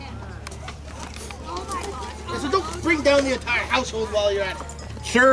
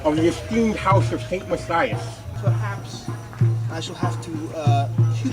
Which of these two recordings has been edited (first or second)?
second